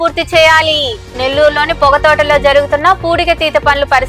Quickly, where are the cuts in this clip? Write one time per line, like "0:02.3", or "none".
none